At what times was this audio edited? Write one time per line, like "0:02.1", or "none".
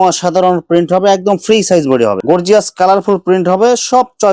0:02.2